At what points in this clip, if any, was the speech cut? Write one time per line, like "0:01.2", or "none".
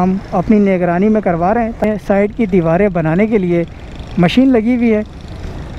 0:01.8